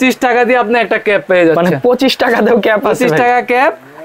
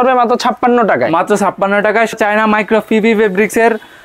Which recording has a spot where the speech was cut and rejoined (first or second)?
second